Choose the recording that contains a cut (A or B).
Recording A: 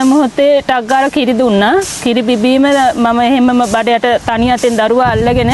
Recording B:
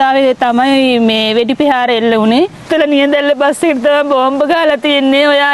B